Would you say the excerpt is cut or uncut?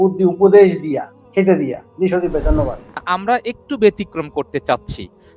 cut